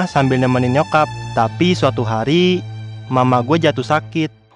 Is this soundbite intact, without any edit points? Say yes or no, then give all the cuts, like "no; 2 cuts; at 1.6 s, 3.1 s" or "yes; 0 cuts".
no; 1 cut; at 1.2 s